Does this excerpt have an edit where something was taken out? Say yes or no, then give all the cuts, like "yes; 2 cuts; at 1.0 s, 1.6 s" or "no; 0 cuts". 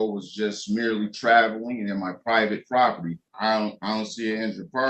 yes; 1 cut; at 3.1 s